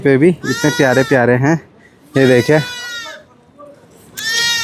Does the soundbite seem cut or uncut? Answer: uncut